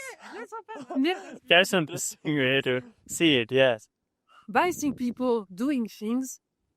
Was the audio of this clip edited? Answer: no; 0 cuts

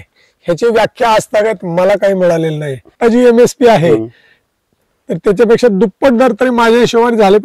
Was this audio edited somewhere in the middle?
yes; 1 cut; at 2.9 s

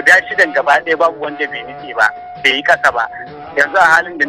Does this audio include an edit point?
yes; 1 cut; at 3.4 s

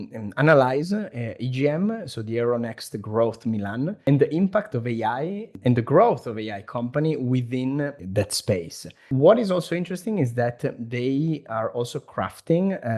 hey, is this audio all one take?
no; 4 cuts; at 4.0 s, 5.5 s, 8.0 s, 9.0 s

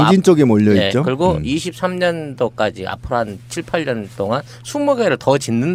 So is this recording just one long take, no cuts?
yes; 0 cuts

